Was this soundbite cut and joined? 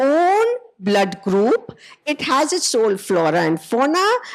no; 0 cuts

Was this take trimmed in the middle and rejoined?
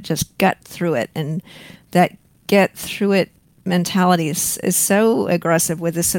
no; 0 cuts

